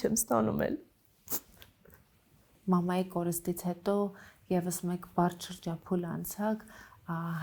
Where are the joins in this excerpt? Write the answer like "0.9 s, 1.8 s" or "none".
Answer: 2.5 s